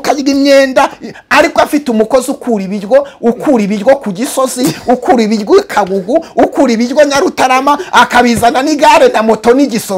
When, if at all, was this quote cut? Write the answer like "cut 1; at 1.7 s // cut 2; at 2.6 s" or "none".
none